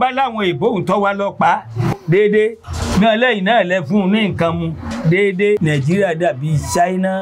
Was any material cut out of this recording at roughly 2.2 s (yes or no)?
no